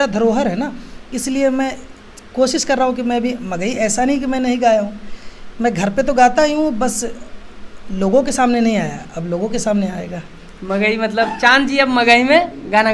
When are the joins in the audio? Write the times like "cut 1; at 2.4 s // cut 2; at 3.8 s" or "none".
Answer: none